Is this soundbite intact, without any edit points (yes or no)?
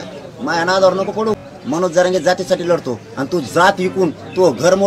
no